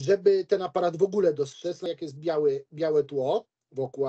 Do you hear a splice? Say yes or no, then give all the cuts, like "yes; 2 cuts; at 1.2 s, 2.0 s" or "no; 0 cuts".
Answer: yes; 1 cut; at 1.9 s